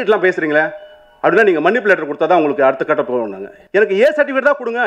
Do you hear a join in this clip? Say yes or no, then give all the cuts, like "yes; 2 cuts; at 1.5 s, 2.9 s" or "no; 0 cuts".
yes; 1 cut; at 3.6 s